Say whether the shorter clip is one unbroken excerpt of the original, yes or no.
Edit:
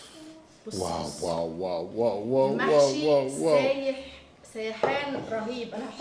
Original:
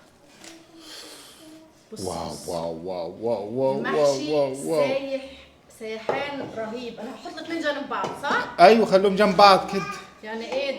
yes